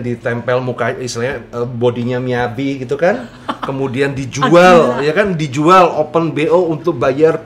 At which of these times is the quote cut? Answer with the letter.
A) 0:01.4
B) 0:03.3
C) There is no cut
C